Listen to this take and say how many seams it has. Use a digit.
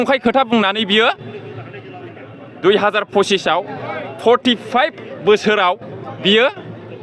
0